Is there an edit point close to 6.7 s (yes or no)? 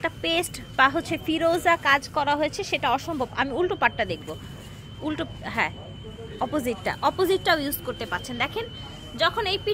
no